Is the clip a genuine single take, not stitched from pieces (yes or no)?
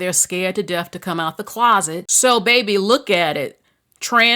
no